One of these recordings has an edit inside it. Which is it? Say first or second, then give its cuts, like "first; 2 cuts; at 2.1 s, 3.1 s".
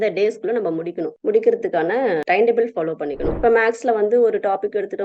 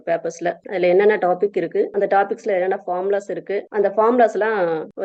first; 2 cuts; at 2.2 s, 3.3 s